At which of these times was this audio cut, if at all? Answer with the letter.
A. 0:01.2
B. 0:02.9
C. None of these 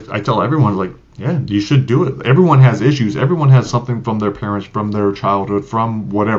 C